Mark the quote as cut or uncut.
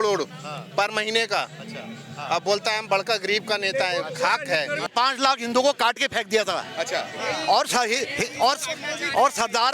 cut